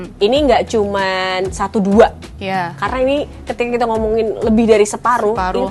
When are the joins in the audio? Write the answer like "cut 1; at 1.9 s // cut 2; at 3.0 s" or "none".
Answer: none